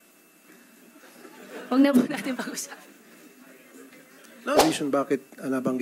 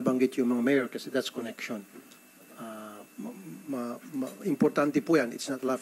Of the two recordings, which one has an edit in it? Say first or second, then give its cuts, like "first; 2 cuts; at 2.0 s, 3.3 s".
first; 1 cut; at 4.6 s